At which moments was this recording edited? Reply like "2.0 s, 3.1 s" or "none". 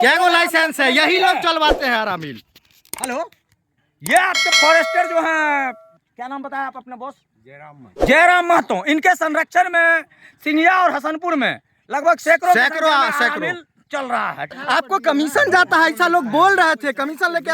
14.5 s